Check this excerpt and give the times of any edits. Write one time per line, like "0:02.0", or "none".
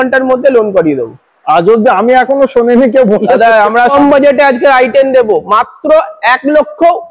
0:03.9